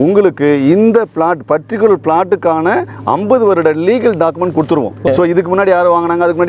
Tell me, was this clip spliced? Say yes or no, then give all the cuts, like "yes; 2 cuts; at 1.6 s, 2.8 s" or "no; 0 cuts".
yes; 1 cut; at 5.1 s